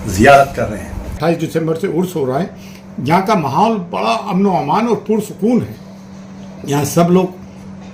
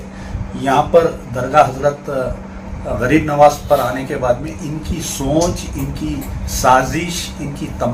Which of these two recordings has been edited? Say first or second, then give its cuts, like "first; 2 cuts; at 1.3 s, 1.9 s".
first; 1 cut; at 1.2 s